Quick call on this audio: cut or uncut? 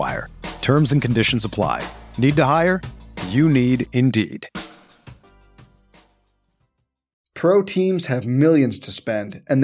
cut